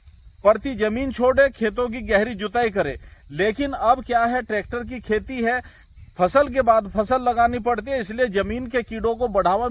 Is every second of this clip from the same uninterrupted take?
yes; 0 cuts

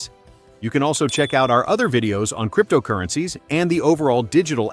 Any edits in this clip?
no; 0 cuts

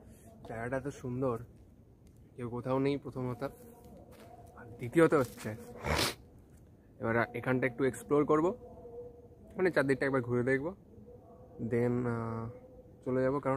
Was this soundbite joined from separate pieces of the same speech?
no; 0 cuts

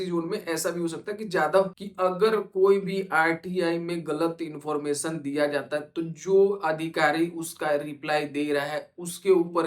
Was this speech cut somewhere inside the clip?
yes; 1 cut; at 1.7 s

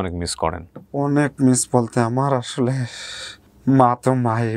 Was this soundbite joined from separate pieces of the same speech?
no; 0 cuts

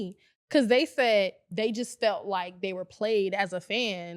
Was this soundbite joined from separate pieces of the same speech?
no; 0 cuts

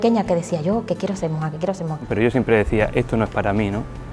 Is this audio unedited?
no; 1 cut; at 2.2 s

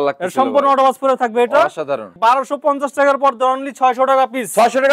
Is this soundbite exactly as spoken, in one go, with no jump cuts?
no; 1 cut; at 2.1 s

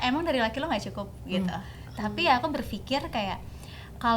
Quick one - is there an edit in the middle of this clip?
no; 0 cuts

